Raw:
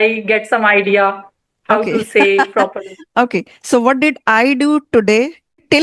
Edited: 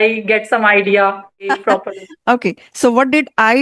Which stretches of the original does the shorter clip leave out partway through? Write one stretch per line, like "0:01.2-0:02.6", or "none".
0:01.5-0:02.4